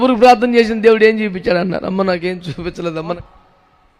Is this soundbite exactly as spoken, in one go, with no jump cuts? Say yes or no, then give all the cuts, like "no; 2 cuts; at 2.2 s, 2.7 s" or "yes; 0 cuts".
no; 1 cut; at 3.0 s